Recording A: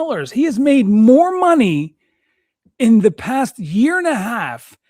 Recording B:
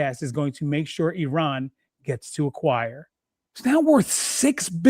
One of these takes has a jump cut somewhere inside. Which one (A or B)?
B